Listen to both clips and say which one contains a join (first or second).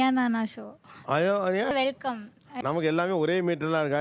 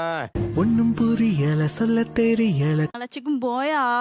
second